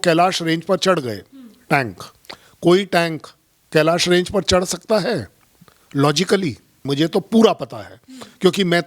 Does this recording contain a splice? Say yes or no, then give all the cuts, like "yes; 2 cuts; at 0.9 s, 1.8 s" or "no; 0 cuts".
yes; 1 cut; at 6.9 s